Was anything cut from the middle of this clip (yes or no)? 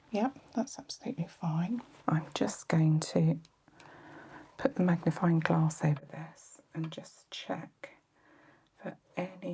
yes